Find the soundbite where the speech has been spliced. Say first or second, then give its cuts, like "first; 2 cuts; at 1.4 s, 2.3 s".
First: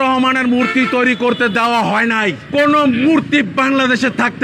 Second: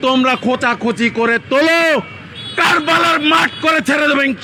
first; 1 cut; at 2.5 s